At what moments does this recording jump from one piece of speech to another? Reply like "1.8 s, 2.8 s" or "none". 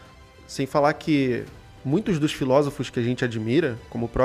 none